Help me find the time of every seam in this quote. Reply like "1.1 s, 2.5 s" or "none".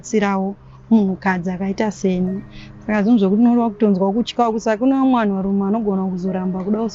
none